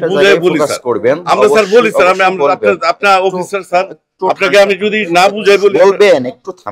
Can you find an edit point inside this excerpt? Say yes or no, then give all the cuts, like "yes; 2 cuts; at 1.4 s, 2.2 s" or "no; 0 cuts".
no; 0 cuts